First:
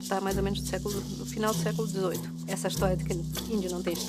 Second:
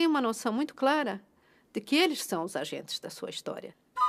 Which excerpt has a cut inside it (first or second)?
first